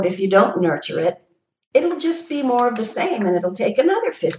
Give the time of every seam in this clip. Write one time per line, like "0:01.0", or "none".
none